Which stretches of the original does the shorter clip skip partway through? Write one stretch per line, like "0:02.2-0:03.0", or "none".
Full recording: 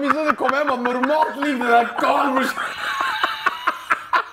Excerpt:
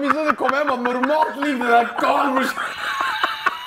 none